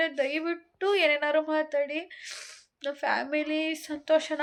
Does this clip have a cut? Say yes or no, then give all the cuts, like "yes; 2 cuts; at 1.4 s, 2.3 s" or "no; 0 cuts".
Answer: no; 0 cuts